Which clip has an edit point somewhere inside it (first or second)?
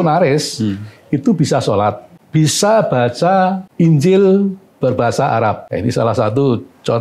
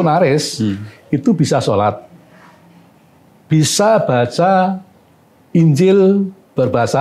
first